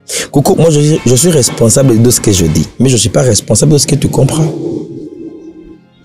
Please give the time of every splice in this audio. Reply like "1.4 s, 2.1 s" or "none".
none